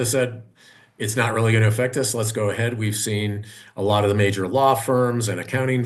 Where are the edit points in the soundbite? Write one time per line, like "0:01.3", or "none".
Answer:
none

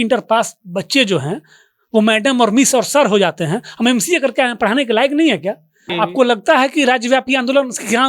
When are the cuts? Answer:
0:05.9

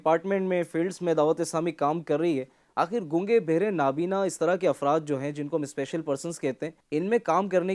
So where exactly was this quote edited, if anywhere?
0:06.8

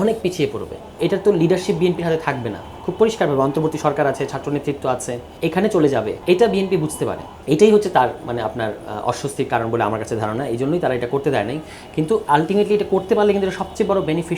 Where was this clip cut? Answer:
0:01.0
0:05.2
0:06.1
0:07.3

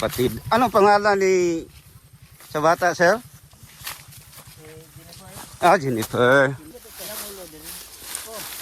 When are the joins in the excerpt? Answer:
0:06.7

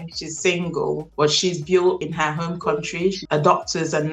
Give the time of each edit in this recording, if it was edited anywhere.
0:03.2

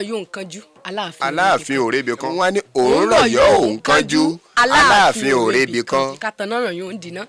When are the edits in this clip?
0:02.3
0:06.2

